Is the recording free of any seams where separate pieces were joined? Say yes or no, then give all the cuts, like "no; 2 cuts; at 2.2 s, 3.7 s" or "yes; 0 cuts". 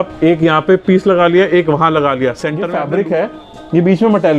no; 1 cut; at 2.7 s